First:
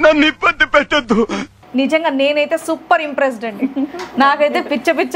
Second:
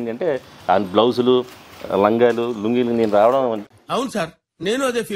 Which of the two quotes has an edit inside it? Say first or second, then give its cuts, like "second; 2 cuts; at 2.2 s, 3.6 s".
first; 1 cut; at 1.5 s